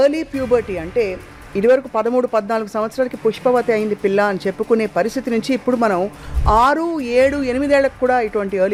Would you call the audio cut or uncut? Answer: uncut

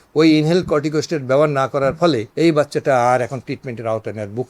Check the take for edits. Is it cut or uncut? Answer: cut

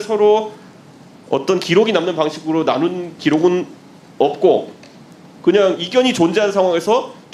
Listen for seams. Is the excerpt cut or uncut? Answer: uncut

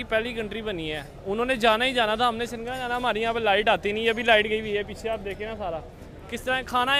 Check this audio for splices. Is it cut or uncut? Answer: uncut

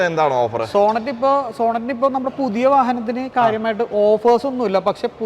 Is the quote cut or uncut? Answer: uncut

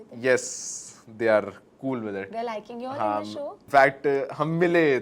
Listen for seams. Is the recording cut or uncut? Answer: cut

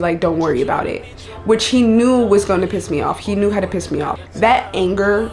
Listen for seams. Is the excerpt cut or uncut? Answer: cut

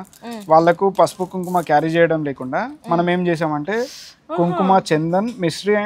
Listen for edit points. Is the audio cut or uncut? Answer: uncut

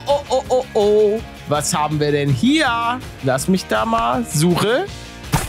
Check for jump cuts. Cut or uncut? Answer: uncut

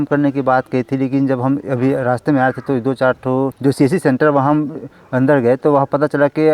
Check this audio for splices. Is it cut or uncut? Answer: uncut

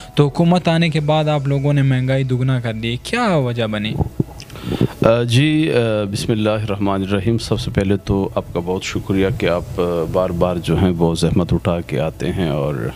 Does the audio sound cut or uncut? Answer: uncut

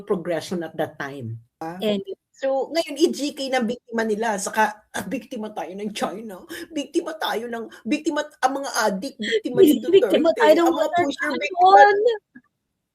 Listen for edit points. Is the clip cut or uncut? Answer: cut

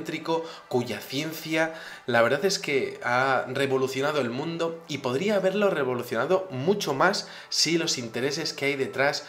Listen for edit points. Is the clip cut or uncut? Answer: cut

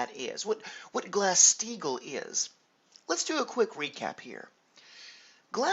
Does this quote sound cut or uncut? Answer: cut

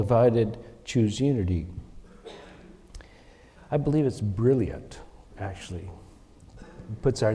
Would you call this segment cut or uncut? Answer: uncut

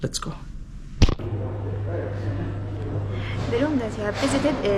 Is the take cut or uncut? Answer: uncut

